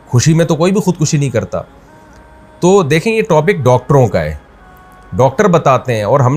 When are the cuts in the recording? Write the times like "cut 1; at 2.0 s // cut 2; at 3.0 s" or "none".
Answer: none